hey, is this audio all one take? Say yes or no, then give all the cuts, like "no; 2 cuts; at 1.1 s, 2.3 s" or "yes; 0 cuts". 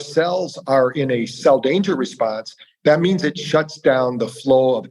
no; 1 cut; at 1.3 s